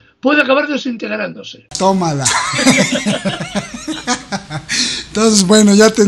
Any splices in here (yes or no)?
yes